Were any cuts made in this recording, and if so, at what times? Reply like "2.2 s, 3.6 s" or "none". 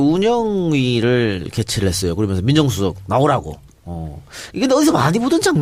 none

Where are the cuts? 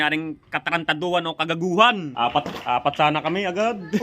2.1 s

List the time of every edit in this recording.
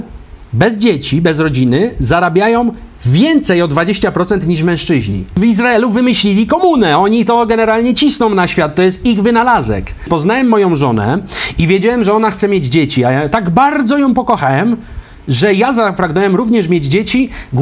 5.4 s, 10.0 s

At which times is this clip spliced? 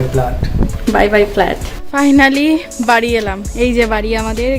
1.7 s

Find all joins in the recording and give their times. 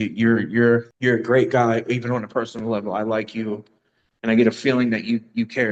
0.9 s

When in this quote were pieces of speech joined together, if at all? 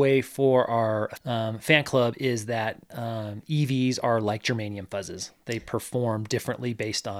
1.1 s

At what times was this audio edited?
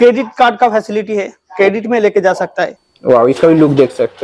2.8 s

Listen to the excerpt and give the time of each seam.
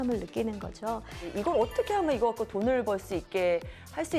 1.4 s

